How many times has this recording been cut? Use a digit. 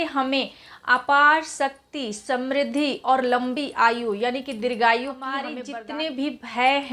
1